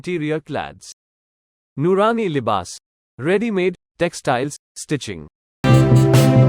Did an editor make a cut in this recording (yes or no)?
yes